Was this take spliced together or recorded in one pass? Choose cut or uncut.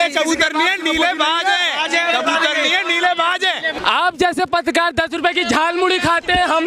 cut